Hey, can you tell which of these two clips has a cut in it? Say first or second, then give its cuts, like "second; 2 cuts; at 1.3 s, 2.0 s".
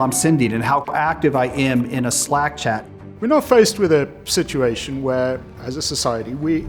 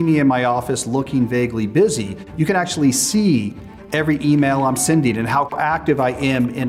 first; 1 cut; at 3.0 s